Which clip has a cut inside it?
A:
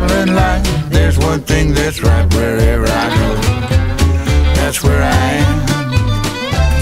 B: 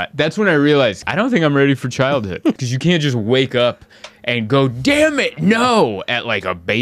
B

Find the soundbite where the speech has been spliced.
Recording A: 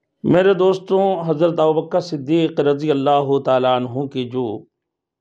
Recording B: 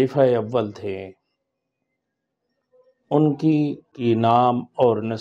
B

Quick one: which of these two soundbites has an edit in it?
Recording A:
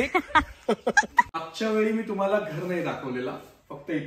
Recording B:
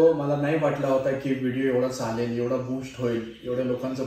A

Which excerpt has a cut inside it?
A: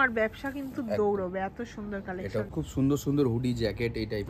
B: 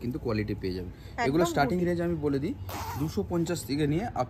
A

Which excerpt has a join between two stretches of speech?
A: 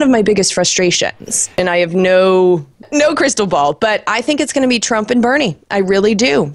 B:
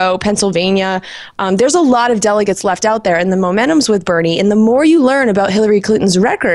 A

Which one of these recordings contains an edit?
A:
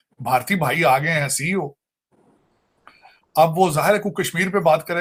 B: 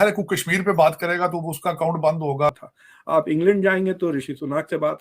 B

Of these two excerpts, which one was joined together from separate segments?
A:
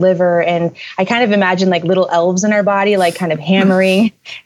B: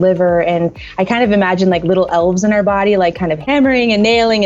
B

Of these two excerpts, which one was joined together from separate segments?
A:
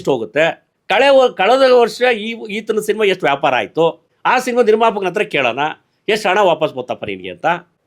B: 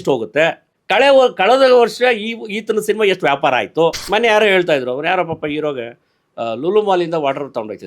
B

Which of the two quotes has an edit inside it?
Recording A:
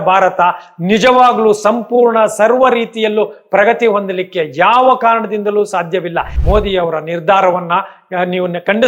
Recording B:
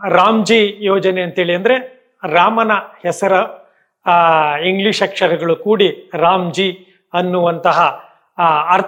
A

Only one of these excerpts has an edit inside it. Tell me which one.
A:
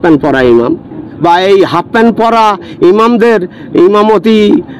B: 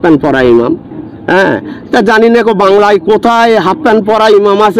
A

